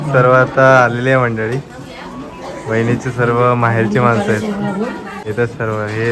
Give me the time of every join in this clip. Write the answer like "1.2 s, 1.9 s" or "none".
5.2 s